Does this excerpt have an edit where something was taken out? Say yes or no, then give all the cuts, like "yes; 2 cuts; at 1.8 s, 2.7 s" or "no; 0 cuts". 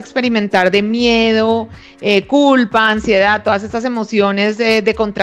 no; 0 cuts